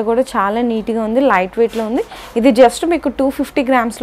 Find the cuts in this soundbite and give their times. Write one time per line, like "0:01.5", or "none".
none